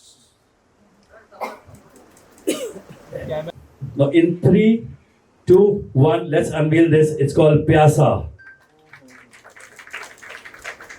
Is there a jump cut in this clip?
yes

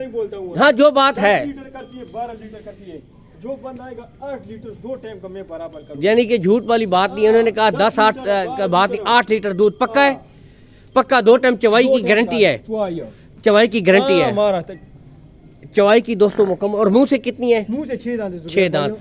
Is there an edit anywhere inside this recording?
no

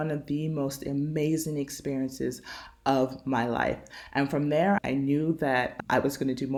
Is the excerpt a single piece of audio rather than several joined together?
yes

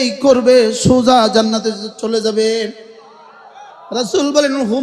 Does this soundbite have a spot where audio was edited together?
no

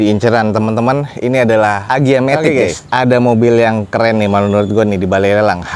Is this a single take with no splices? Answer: no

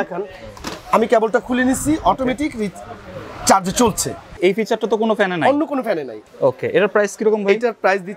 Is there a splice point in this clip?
yes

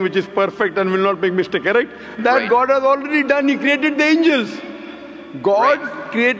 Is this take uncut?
yes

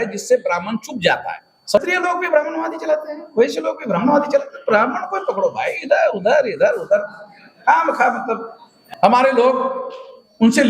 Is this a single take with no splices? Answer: no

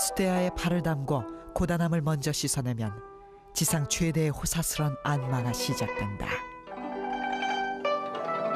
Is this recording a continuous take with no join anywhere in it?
yes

